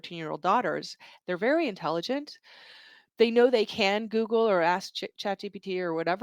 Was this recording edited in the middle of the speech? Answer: no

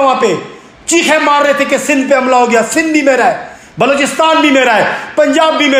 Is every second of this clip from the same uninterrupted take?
yes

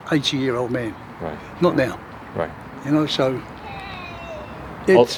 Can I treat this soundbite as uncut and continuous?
yes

